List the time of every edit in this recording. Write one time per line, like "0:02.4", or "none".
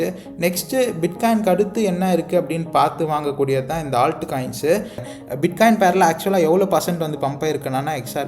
0:05.0